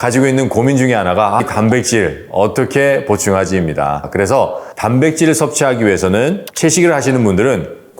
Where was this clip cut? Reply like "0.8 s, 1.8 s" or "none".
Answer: 4.1 s